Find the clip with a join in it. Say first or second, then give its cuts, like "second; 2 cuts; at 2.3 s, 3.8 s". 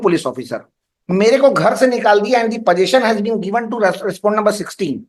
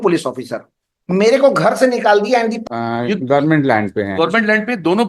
second; 1 cut; at 2.6 s